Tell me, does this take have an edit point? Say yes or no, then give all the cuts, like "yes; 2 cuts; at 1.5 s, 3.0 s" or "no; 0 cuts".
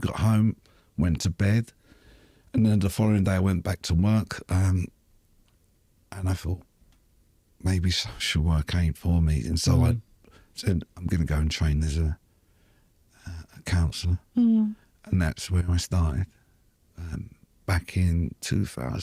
no; 0 cuts